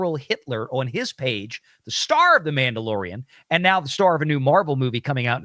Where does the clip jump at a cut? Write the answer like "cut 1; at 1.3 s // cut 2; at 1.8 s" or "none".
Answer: none